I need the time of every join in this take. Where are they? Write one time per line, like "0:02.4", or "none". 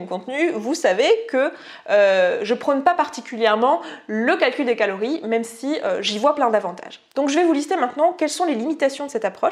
none